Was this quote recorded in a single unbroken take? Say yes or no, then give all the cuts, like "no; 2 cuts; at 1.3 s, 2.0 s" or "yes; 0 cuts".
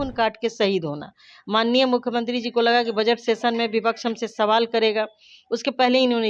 yes; 0 cuts